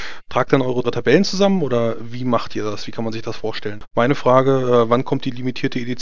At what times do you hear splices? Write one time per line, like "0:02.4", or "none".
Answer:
0:03.7